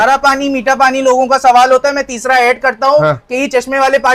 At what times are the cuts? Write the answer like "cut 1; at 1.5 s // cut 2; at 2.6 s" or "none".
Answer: none